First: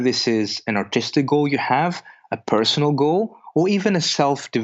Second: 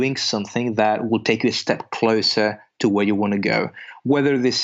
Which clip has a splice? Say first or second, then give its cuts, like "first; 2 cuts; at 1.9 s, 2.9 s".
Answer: second; 1 cut; at 1.0 s